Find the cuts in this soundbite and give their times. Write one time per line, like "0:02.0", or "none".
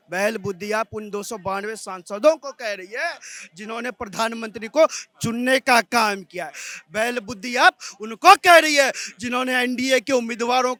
none